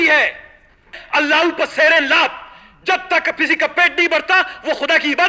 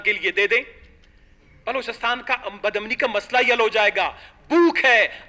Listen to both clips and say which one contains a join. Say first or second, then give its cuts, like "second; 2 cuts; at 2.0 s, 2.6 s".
first; 1 cut; at 1.0 s